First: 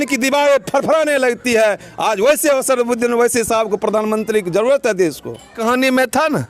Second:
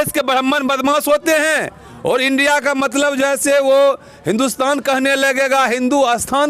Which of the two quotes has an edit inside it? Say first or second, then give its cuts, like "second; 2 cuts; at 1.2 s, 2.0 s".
first; 1 cut; at 5.6 s